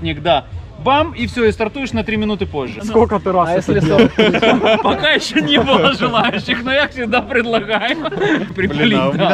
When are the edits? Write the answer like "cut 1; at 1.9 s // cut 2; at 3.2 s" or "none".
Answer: none